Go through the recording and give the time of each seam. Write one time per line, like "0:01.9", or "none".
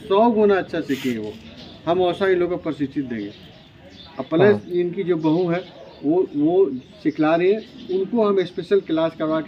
none